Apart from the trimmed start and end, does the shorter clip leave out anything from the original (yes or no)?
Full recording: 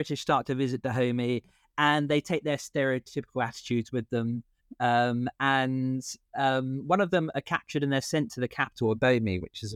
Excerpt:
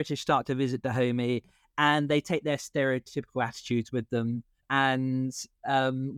yes